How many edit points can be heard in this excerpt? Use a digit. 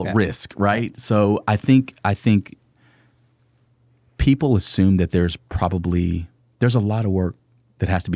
0